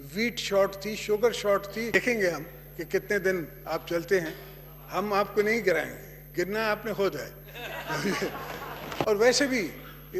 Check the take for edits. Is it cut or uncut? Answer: cut